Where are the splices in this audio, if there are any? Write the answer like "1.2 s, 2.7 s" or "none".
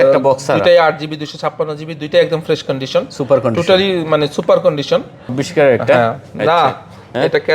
5.4 s